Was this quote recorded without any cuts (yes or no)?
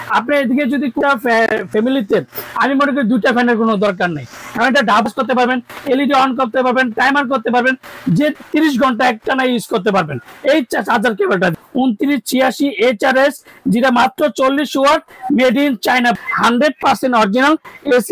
no